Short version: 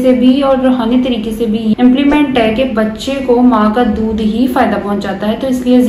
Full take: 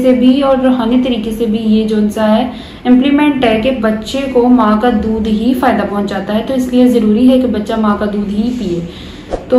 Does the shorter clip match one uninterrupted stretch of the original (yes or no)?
no